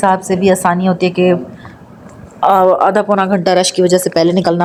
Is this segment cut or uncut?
uncut